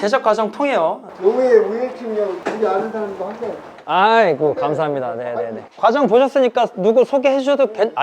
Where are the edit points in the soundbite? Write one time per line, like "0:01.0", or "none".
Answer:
0:01.1